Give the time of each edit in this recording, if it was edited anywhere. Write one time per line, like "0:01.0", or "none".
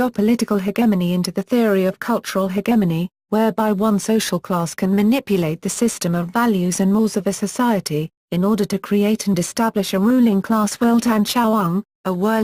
0:11.3